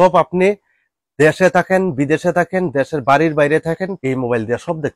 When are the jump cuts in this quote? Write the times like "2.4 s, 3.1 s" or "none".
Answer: 4.0 s